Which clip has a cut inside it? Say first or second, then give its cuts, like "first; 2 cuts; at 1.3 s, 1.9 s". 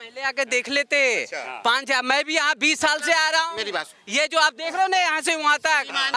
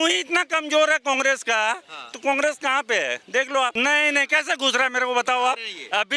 second; 1 cut; at 3.7 s